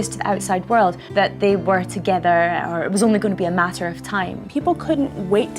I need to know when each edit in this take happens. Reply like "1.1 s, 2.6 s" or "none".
1.0 s, 4.4 s